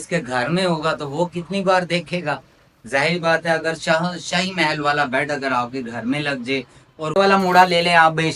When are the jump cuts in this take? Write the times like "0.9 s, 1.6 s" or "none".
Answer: 7.0 s